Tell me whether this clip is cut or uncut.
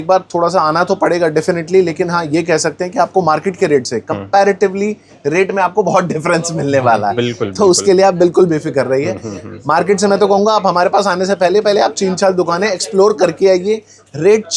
cut